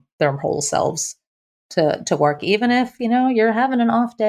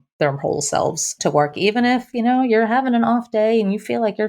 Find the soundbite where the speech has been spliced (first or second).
second